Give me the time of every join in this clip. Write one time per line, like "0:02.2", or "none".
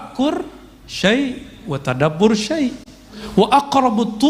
0:03.2